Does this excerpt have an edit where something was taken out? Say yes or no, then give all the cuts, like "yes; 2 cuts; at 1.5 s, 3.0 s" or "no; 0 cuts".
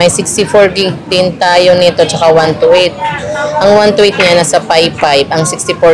no; 0 cuts